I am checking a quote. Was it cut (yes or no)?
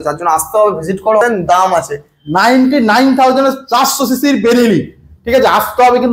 yes